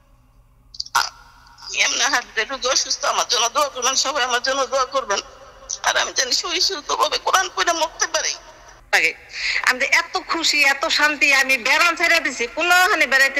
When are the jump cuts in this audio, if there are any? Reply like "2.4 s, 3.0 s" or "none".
8.8 s